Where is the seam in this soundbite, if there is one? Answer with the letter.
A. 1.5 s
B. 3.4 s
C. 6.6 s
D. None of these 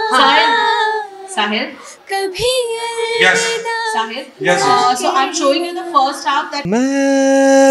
C